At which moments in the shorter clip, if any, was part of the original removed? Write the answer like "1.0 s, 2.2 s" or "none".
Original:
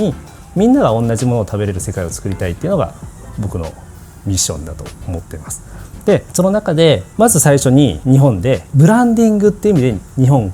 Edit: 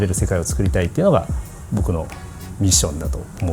none